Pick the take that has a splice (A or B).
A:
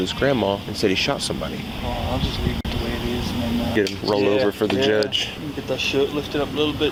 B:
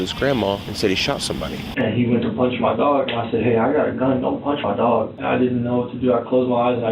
B